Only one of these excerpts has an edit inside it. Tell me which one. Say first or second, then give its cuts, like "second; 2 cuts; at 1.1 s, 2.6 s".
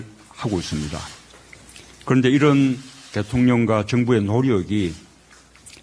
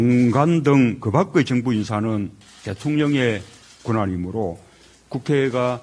first; 1 cut; at 2.2 s